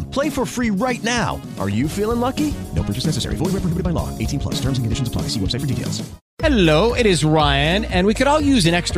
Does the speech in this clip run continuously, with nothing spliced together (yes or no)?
no